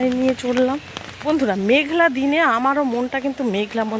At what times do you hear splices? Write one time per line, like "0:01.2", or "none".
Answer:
0:01.3